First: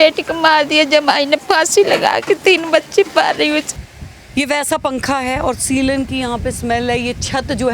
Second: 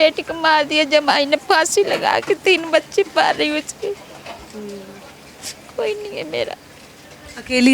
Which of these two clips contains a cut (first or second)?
first